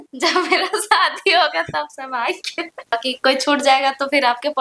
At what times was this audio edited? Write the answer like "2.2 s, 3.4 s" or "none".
2.9 s